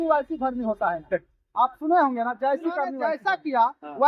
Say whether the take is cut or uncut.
cut